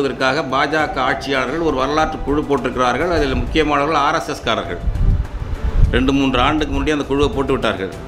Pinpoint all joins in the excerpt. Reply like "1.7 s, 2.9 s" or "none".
none